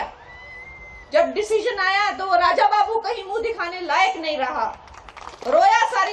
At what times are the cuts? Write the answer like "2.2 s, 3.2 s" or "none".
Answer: none